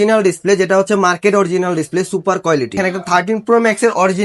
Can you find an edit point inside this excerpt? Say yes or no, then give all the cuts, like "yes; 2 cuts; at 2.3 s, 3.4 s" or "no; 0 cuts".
yes; 1 cut; at 2.8 s